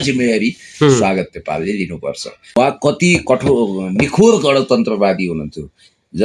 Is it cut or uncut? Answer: cut